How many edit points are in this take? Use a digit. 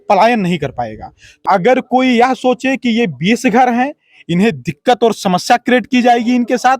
1